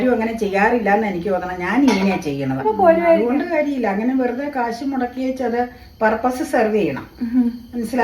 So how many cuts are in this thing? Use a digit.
1